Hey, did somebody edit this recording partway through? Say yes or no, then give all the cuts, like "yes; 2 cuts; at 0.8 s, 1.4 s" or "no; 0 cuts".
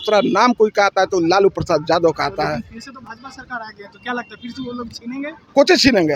no; 0 cuts